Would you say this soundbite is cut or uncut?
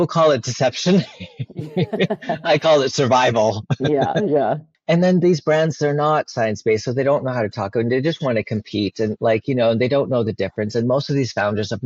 uncut